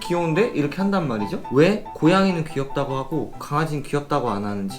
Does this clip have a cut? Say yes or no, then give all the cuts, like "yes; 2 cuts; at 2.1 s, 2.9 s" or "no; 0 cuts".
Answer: yes; 1 cut; at 1.9 s